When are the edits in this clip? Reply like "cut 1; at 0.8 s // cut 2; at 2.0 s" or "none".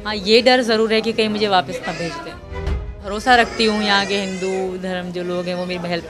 cut 1; at 2.9 s

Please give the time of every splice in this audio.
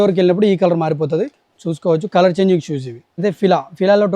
cut 1; at 3.2 s

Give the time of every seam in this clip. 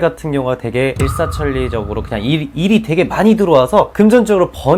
cut 1; at 1.0 s // cut 2; at 3.9 s

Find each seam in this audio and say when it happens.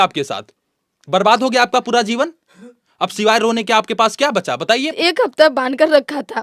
cut 1; at 4.9 s

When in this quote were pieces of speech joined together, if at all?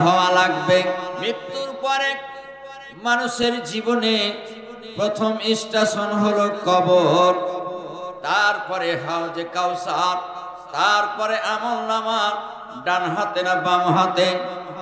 cut 1; at 1.2 s

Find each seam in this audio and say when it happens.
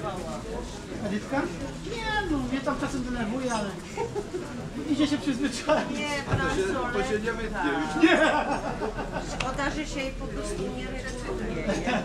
none

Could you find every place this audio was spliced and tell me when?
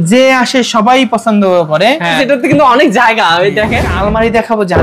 cut 1; at 2.2 s // cut 2; at 3.9 s

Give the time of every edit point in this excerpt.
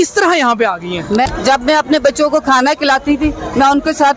cut 1; at 1.3 s

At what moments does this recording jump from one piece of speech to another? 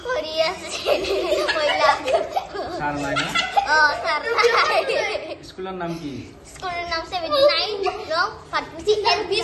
none

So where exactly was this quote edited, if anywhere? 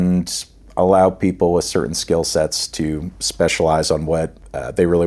none

